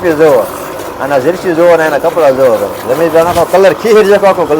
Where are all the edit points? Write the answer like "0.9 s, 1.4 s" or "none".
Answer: none